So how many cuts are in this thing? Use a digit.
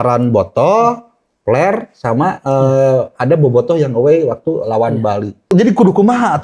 1